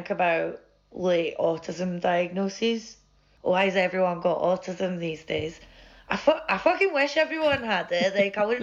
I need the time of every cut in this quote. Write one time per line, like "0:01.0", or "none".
none